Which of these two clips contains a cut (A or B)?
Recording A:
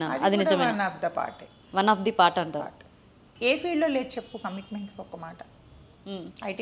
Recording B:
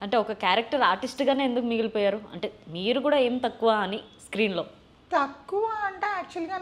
A